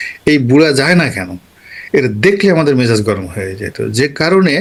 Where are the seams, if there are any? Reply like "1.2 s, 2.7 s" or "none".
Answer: none